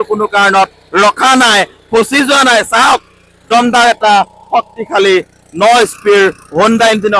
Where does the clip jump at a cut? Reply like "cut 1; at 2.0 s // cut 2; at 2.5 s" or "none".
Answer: none